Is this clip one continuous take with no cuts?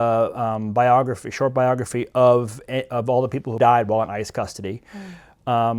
no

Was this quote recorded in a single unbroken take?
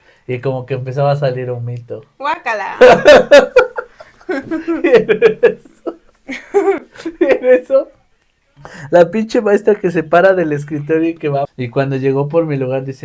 no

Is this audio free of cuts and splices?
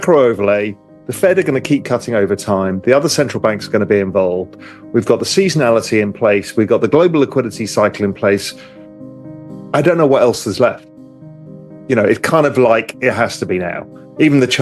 yes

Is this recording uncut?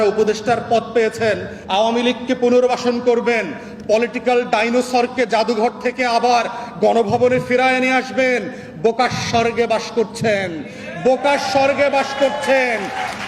no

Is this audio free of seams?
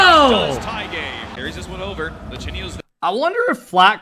no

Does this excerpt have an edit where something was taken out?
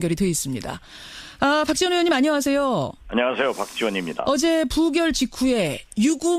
yes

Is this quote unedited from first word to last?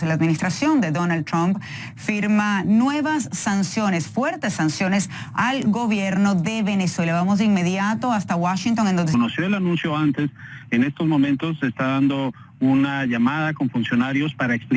yes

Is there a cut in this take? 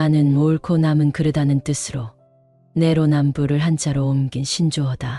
no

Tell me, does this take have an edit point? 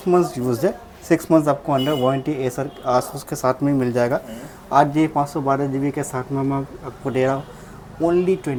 no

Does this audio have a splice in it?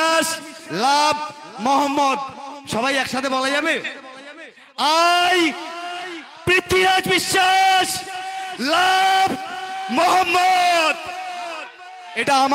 no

